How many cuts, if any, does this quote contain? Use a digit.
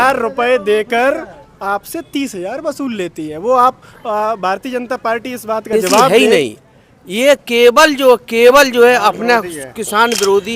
1